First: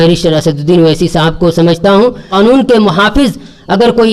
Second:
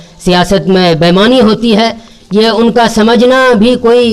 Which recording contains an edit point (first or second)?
first